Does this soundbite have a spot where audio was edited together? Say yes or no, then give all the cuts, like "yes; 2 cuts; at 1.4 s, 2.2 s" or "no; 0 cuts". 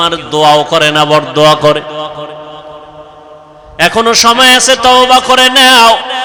no; 0 cuts